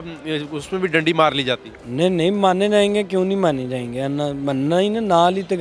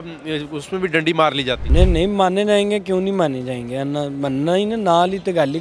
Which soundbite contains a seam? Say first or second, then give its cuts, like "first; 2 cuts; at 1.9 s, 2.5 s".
second; 1 cut; at 1.6 s